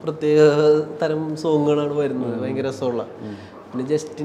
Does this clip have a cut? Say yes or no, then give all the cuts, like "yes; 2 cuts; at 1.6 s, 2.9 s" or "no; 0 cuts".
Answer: no; 0 cuts